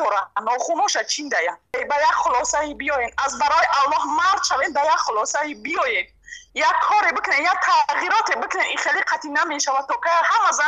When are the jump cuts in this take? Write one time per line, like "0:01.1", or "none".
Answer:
0:01.7